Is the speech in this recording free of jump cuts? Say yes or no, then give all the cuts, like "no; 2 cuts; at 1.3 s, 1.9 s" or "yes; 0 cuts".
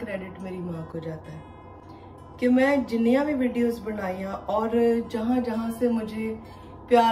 yes; 0 cuts